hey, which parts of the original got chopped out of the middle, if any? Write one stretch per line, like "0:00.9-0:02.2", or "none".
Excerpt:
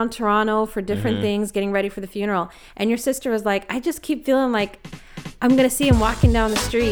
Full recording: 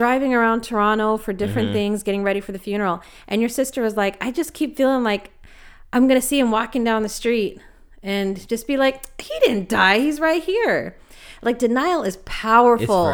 none